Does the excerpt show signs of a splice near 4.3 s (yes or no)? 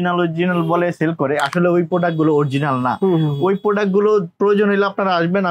no